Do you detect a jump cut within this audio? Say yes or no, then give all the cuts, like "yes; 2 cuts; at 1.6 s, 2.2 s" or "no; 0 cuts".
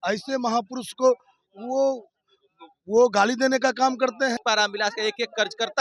yes; 1 cut; at 4.4 s